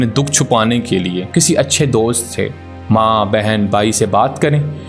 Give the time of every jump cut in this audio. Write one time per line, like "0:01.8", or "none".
0:01.2